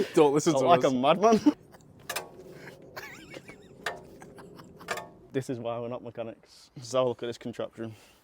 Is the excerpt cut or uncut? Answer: cut